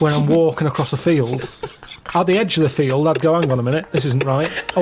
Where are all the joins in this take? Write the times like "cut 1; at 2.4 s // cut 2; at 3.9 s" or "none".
none